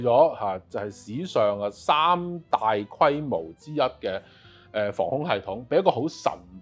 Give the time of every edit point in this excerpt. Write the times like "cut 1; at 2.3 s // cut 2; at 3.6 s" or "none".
none